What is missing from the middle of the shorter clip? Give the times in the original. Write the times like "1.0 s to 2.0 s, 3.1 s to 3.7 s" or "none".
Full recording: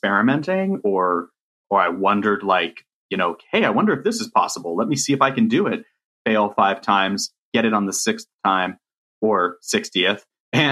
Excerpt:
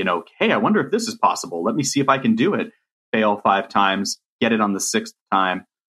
none